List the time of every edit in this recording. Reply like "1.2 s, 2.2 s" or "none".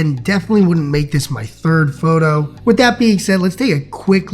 2.5 s

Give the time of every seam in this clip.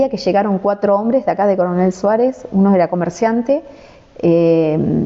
none

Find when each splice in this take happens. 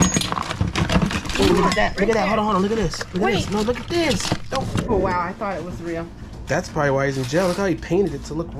4.9 s

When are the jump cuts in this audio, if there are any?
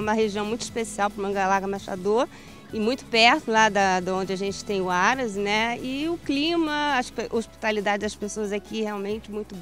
none

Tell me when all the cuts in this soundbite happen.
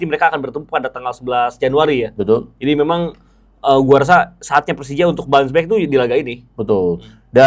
none

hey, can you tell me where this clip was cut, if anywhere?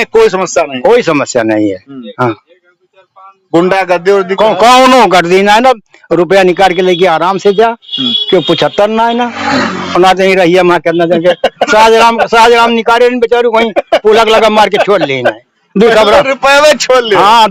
none

